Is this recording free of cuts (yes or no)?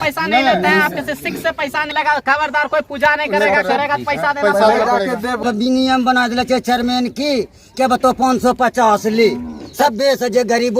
no